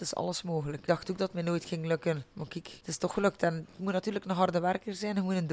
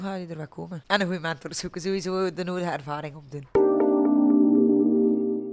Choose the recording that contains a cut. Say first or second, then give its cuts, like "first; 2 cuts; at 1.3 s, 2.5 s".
second; 1 cut; at 3.4 s